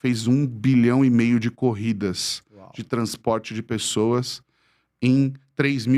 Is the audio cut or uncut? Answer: uncut